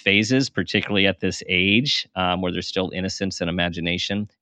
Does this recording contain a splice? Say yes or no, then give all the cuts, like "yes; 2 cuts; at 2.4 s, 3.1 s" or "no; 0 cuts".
no; 0 cuts